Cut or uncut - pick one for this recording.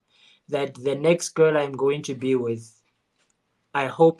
uncut